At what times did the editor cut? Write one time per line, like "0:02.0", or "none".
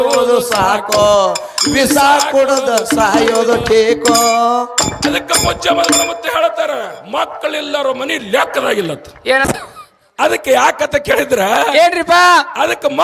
0:09.5